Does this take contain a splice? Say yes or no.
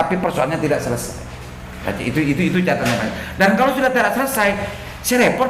no